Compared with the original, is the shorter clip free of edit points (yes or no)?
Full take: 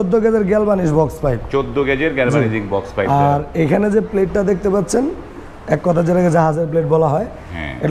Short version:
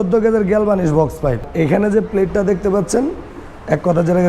no